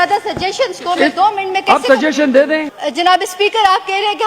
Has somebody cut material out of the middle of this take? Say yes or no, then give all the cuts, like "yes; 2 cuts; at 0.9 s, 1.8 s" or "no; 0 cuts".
yes; 1 cut; at 2.7 s